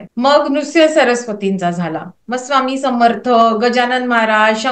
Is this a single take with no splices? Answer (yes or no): yes